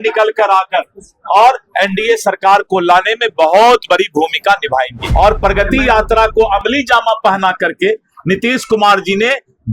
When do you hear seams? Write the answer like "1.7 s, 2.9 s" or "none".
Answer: 5.0 s